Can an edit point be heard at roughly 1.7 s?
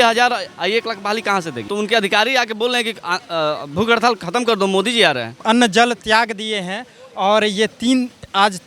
yes; 2 cuts; at 1.7 s, 5.4 s

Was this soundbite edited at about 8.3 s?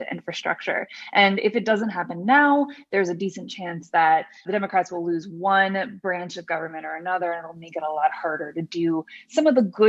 no; 0 cuts

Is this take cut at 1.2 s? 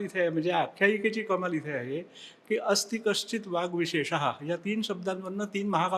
no; 0 cuts

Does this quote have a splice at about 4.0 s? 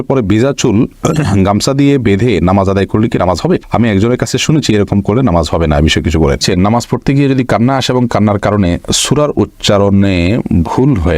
no; 1 cut; at 6.4 s

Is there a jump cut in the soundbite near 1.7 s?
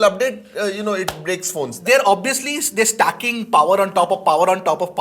yes; 1 cut; at 1.7 s

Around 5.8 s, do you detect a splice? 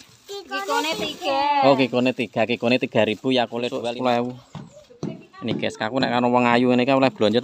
no; 1 cut; at 3.6 s

